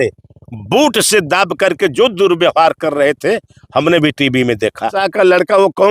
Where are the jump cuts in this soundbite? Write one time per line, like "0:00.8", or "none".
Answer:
0:05.0